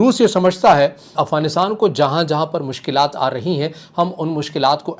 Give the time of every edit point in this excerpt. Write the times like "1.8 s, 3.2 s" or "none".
1.1 s